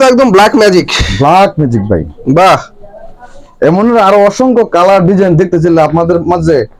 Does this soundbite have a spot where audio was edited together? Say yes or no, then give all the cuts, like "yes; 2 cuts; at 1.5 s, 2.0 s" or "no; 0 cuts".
no; 0 cuts